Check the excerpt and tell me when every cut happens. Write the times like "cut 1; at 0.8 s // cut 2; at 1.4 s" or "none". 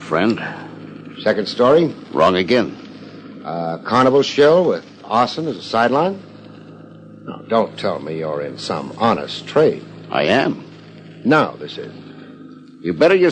none